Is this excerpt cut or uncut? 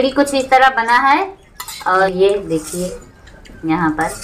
cut